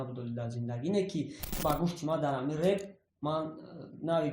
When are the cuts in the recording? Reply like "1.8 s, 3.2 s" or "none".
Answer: 1.5 s